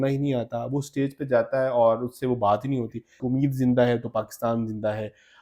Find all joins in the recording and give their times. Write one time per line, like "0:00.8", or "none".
0:03.2